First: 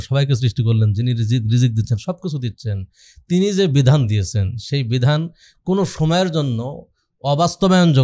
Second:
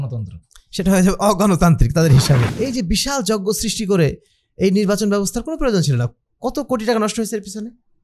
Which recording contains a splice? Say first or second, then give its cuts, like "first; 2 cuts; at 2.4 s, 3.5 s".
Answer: second; 1 cut; at 2.5 s